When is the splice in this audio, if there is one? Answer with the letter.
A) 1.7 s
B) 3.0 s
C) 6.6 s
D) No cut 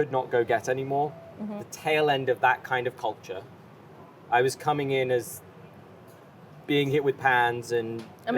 A